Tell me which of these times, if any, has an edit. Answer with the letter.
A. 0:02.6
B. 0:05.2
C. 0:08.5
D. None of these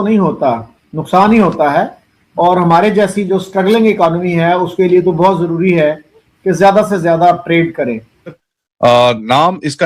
C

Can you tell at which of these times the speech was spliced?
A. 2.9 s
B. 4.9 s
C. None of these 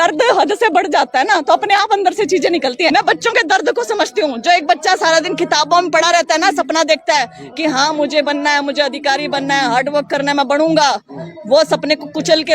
A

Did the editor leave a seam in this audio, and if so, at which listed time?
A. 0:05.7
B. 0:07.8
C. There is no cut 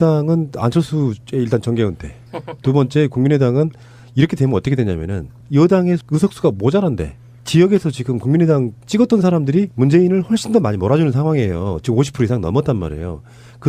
A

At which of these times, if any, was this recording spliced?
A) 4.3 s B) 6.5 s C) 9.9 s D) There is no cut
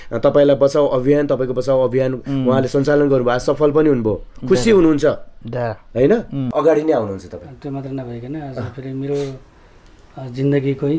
B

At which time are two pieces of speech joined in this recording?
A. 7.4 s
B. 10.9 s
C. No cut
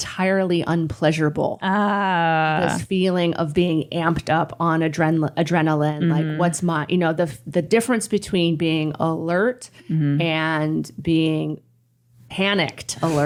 C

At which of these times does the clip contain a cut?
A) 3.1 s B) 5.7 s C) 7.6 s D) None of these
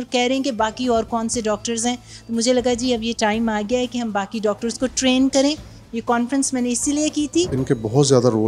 C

